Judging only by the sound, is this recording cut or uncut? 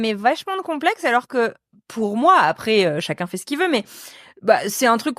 uncut